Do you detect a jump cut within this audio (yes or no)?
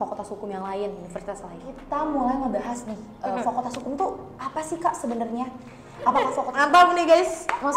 yes